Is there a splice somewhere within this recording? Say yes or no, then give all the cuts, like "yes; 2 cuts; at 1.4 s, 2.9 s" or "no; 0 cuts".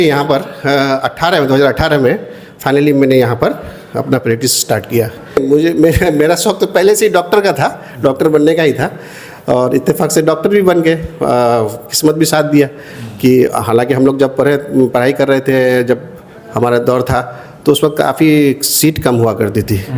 yes; 1 cut; at 5.4 s